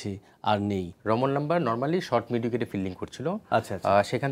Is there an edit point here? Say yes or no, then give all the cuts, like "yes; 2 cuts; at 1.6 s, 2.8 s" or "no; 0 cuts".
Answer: yes; 1 cut; at 0.9 s